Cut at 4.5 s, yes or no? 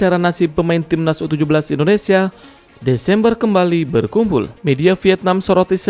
yes